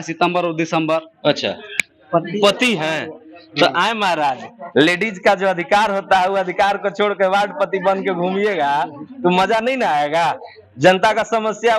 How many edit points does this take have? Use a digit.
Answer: 1